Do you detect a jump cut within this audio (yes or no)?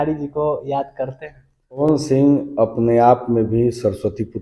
yes